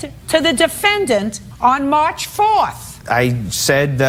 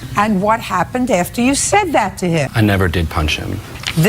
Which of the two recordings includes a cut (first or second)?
second